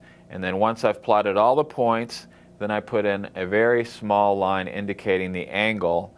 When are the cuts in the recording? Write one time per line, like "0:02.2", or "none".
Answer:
0:01.7